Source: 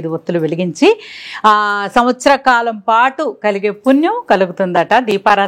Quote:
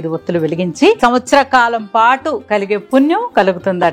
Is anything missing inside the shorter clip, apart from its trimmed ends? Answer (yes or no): yes